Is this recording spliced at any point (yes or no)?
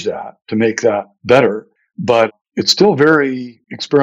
no